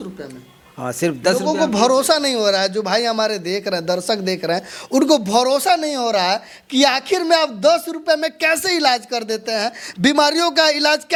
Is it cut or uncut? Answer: uncut